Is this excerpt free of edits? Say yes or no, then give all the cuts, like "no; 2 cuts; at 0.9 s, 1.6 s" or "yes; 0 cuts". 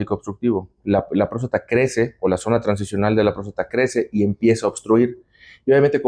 yes; 0 cuts